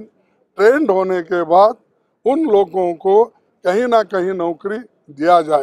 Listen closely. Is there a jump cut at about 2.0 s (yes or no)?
no